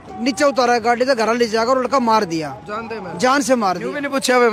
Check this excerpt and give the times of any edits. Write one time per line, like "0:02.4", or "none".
none

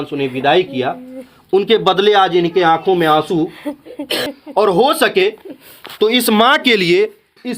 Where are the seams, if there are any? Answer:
0:04.3

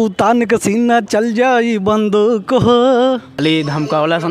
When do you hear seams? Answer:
0:03.3

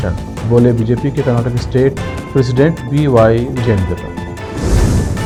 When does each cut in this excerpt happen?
none

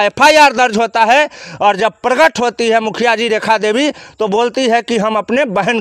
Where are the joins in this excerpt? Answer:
0:04.1

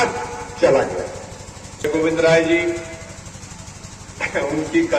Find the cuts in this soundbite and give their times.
0:01.9

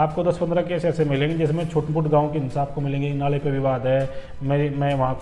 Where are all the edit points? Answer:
none

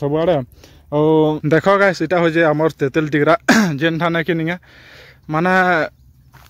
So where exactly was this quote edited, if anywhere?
0:01.4

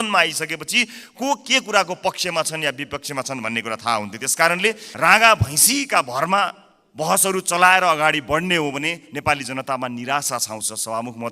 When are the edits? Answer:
0:04.9

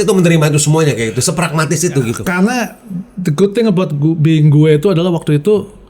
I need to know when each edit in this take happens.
0:02.1

